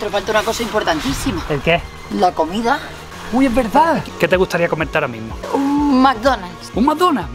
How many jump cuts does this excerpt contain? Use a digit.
2